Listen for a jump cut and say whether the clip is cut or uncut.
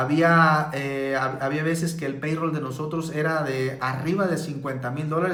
uncut